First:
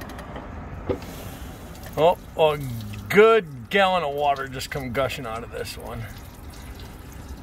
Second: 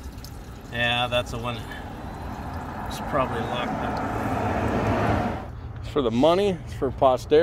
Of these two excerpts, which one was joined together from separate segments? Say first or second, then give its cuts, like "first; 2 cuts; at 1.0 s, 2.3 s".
second; 1 cut; at 5.5 s